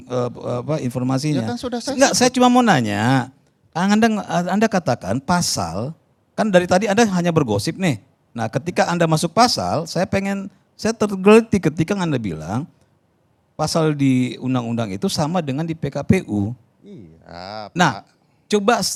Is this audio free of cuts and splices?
yes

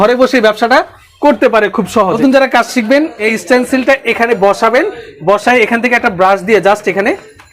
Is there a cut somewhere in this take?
yes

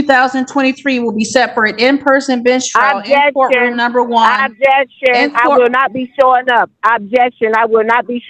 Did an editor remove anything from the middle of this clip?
no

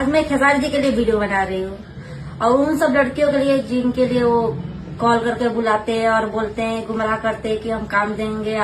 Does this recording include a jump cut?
no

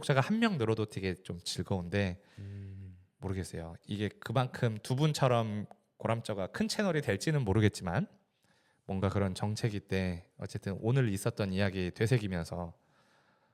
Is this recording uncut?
yes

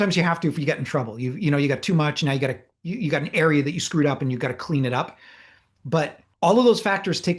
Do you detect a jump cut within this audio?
yes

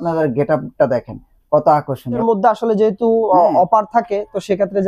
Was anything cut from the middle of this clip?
yes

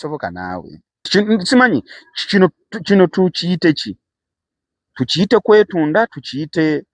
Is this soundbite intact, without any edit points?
no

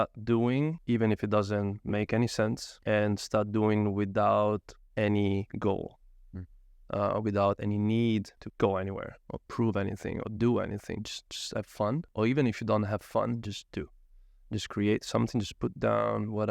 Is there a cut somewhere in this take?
yes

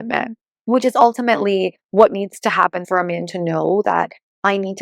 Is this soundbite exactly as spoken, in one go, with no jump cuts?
no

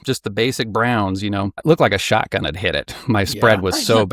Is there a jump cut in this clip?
yes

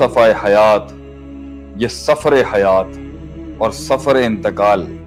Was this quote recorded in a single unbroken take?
yes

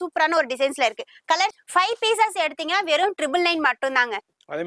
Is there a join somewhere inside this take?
yes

